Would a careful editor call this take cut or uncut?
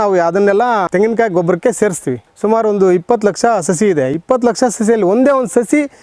cut